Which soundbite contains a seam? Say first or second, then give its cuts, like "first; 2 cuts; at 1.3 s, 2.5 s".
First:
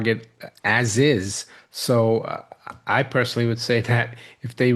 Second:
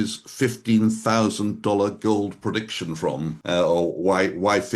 second; 1 cut; at 3.4 s